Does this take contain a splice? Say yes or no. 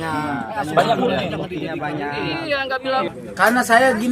yes